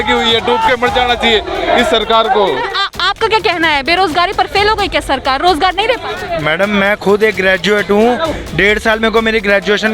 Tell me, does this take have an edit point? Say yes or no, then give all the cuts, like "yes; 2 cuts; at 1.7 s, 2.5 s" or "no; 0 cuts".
yes; 1 cut; at 2.7 s